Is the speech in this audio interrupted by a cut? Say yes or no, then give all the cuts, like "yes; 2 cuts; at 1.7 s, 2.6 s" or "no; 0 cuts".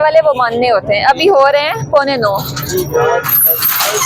no; 0 cuts